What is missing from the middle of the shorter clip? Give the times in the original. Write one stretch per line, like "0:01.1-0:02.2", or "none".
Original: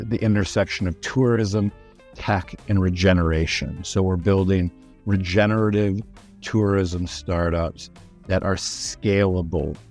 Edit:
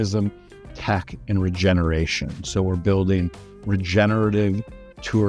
none